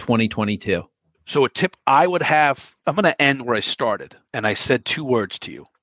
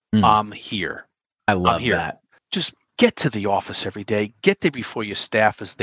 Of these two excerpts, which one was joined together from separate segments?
first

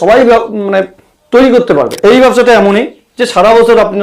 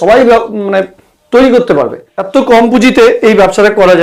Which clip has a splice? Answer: first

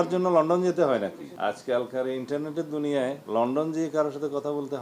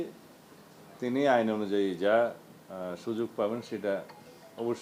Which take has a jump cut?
first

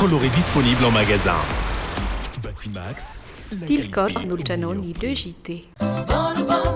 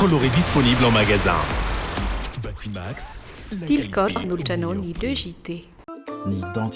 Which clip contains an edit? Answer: first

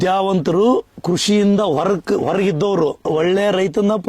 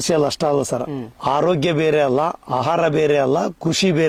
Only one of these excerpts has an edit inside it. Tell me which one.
first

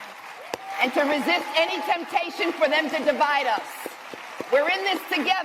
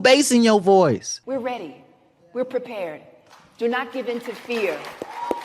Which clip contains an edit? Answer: second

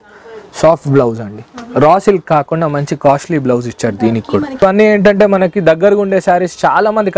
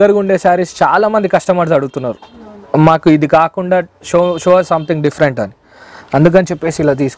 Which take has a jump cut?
first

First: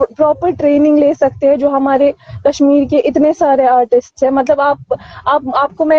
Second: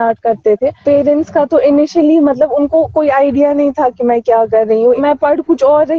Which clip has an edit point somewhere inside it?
second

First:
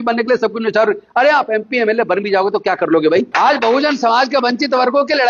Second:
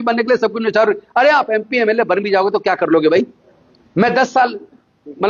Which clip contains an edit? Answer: first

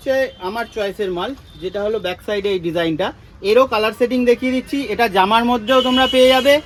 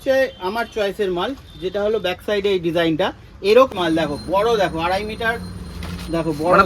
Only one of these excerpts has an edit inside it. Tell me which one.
second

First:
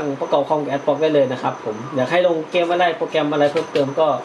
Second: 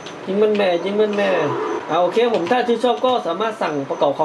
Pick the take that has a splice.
second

